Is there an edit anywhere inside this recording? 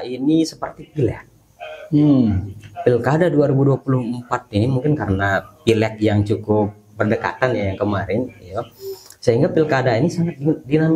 no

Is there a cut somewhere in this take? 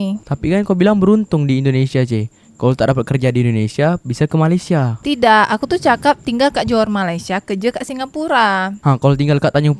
no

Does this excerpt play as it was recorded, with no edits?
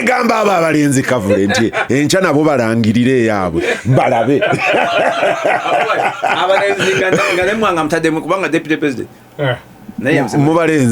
yes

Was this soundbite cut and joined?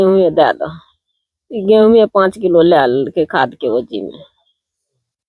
no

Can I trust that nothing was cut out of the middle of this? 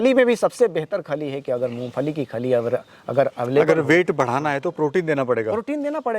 yes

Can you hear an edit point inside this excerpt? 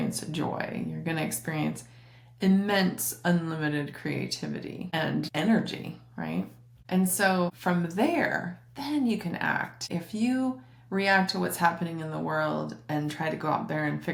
no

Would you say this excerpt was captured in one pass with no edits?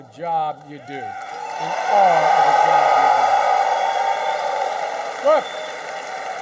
yes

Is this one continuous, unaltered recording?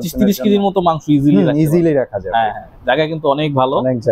yes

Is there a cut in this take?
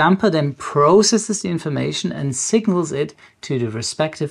no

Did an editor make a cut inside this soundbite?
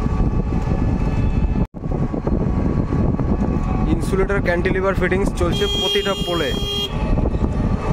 no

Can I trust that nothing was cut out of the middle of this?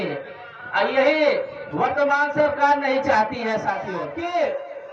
no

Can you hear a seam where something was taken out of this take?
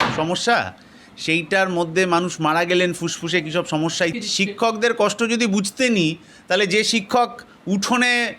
yes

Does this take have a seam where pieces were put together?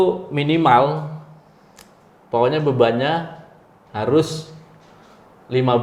no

